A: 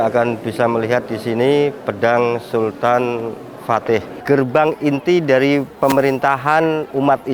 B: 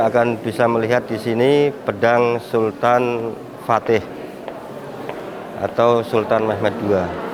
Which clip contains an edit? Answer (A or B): A